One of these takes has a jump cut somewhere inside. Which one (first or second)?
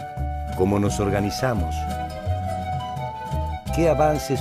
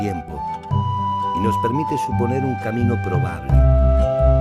first